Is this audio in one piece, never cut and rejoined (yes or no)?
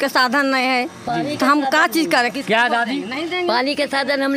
yes